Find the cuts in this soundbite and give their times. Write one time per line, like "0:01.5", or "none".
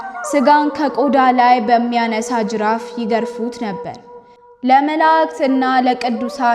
0:04.0